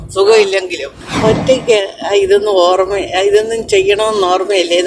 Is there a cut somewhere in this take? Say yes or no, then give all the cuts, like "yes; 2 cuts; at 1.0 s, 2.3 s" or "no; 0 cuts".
yes; 1 cut; at 1.0 s